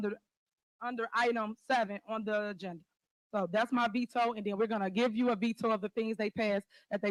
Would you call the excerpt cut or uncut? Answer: uncut